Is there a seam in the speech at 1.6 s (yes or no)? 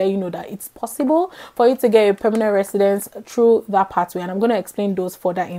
no